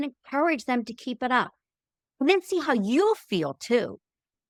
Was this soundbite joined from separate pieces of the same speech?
no; 0 cuts

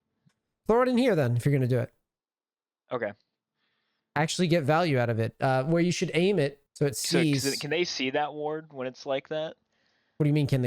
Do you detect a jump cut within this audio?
yes; 1 cut; at 6.6 s

